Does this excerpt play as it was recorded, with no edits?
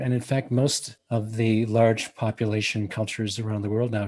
no; 1 cut; at 0.9 s

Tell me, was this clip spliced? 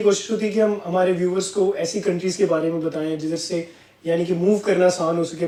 no; 0 cuts

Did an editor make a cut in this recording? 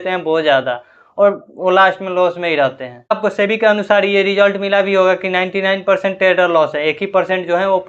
yes; 1 cut; at 2.9 s

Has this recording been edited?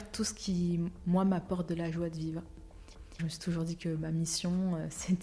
yes; 1 cut; at 2.9 s

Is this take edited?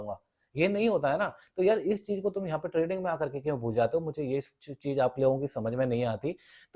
no; 0 cuts

